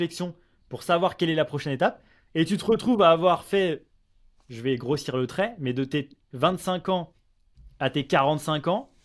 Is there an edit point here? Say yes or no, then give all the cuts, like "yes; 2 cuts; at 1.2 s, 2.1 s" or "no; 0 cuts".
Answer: no; 0 cuts